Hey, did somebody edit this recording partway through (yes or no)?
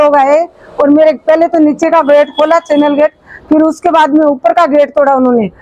no